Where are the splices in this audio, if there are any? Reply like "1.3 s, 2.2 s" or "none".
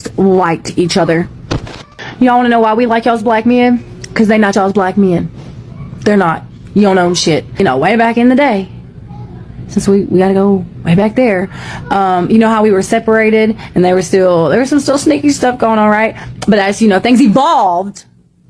none